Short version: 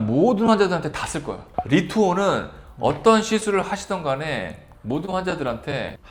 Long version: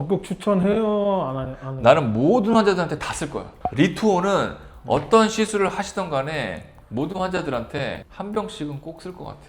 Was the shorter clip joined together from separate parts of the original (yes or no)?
no